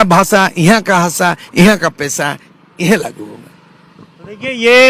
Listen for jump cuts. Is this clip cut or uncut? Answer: uncut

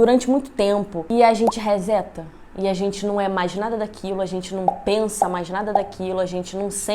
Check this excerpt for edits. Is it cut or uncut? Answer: cut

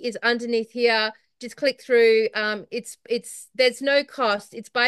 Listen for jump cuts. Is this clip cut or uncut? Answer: uncut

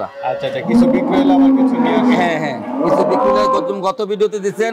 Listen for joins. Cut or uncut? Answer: uncut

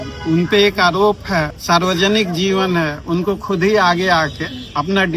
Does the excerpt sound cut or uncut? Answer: cut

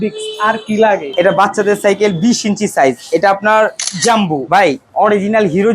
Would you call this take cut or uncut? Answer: cut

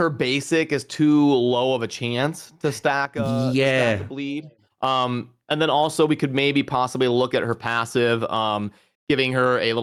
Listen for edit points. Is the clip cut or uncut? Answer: uncut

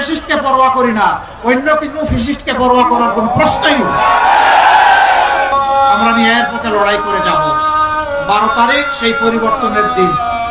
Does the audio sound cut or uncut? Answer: uncut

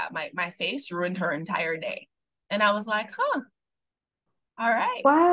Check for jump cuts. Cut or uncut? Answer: uncut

